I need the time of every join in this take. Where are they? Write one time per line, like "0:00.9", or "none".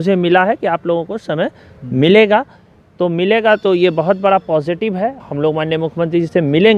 0:05.2